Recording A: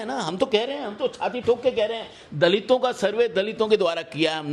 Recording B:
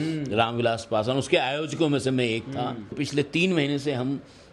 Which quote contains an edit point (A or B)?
B